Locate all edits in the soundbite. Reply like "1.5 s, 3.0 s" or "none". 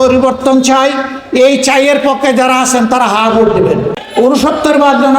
4.0 s